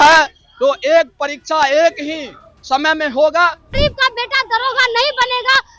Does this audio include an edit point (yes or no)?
yes